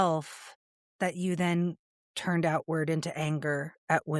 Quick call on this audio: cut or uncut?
uncut